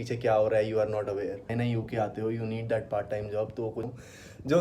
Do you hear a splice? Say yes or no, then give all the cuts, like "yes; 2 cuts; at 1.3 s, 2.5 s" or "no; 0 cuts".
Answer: yes; 2 cuts; at 1.5 s, 3.9 s